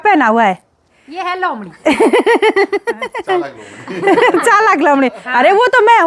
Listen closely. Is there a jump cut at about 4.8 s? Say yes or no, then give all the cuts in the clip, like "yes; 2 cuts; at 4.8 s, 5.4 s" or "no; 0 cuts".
no; 0 cuts